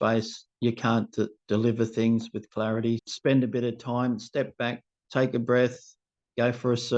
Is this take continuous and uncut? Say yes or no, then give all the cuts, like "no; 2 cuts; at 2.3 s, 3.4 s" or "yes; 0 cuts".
no; 1 cut; at 3.0 s